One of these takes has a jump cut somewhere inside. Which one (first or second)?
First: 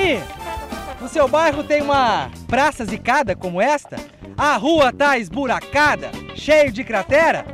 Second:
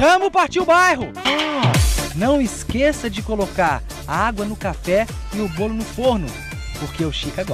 second